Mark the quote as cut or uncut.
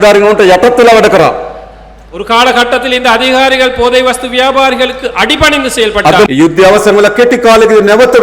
cut